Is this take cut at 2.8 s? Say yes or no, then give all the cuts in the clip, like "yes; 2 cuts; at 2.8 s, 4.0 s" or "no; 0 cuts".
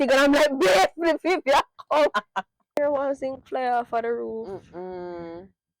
yes; 1 cut; at 2.8 s